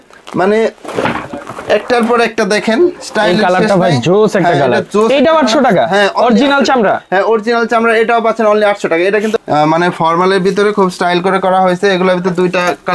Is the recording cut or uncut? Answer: cut